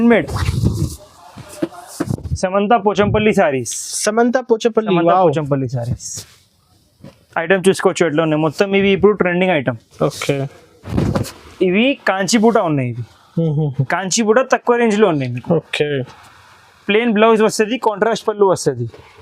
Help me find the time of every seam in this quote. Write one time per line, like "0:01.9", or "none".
0:02.1
0:10.9